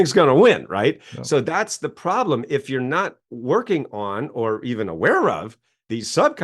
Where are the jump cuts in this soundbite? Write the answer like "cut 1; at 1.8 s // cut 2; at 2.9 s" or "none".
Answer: none